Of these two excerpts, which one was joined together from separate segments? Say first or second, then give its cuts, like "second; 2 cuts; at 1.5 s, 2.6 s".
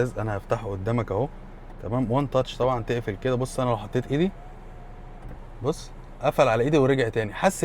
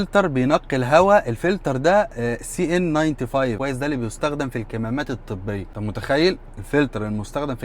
second; 2 cuts; at 3.6 s, 5.7 s